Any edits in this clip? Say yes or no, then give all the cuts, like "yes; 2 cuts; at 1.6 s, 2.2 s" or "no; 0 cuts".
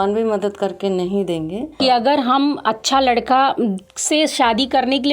yes; 1 cut; at 1.7 s